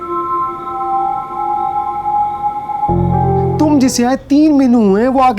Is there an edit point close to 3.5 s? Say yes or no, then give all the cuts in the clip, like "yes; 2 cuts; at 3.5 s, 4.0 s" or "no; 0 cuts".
yes; 1 cut; at 3.5 s